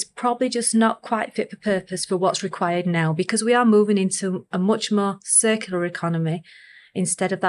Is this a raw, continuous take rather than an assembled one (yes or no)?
yes